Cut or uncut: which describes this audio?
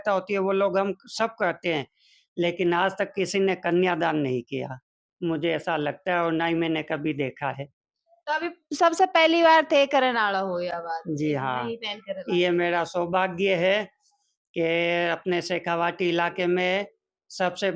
uncut